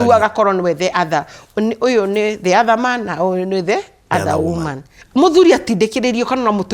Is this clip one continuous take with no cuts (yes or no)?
no